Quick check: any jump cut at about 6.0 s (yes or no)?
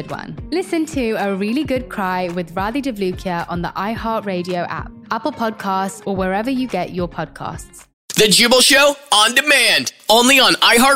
no